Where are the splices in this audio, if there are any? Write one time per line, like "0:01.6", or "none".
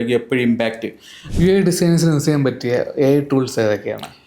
0:01.2